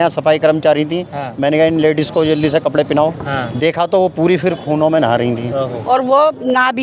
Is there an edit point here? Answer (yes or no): yes